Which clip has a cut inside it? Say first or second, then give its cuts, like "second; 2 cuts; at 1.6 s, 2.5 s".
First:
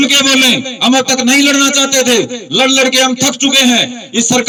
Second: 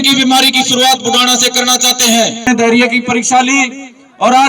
second; 1 cut; at 2.5 s